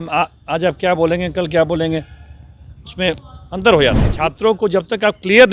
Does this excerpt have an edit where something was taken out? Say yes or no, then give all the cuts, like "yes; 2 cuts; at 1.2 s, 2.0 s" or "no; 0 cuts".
yes; 1 cut; at 4.1 s